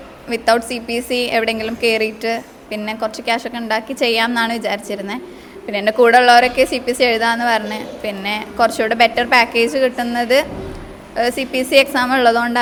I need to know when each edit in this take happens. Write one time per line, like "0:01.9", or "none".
none